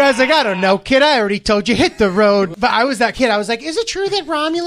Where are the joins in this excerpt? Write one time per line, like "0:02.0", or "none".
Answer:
0:02.5